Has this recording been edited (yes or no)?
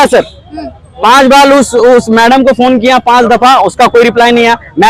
no